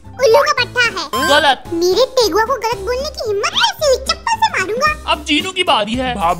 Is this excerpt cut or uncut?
uncut